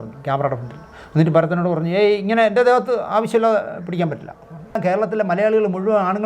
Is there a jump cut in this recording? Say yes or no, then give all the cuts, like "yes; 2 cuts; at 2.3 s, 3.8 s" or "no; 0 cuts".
yes; 1 cut; at 4.8 s